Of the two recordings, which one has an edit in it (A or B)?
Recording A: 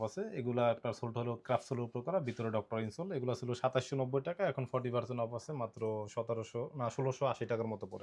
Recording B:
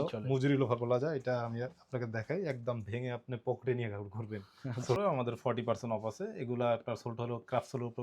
B